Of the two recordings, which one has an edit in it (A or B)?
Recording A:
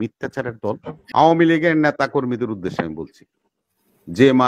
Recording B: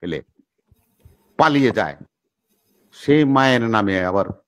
A